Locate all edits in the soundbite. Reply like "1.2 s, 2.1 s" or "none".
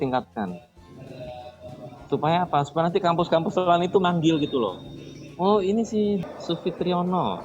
6.2 s